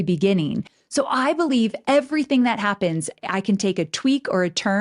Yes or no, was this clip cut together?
no